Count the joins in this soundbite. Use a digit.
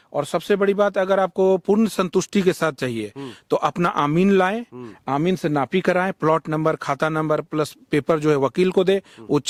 0